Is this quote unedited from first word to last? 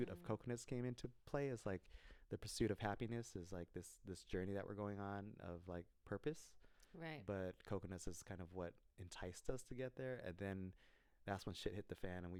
yes; 0 cuts

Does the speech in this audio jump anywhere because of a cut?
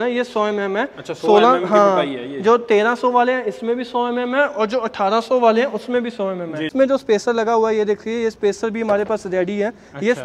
yes; 1 cut; at 6.7 s

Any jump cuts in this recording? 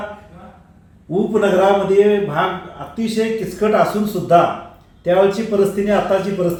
no; 0 cuts

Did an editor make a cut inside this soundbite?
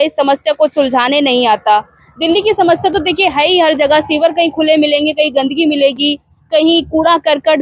no; 0 cuts

